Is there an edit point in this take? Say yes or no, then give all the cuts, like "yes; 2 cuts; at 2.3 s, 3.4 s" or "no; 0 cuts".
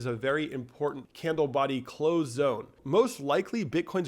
yes; 2 cuts; at 1.1 s, 2.8 s